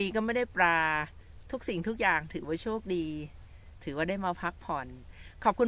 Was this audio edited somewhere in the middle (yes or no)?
no